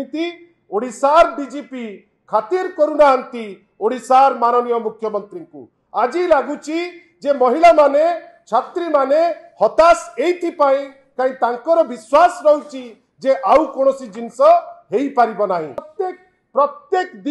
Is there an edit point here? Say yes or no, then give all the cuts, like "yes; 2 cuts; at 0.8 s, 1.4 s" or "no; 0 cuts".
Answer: yes; 1 cut; at 15.9 s